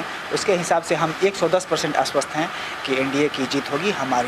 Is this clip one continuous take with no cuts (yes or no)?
yes